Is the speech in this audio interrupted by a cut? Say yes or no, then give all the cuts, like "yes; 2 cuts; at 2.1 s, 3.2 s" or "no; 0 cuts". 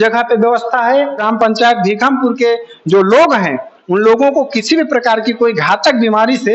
yes; 1 cut; at 1.2 s